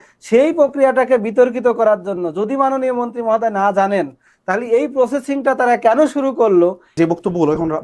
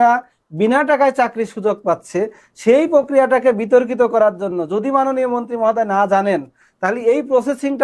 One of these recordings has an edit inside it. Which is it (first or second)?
first